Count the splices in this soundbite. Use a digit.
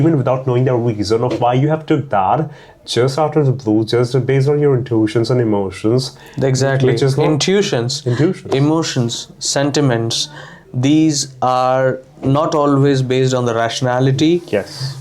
0